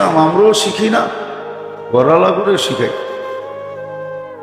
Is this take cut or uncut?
cut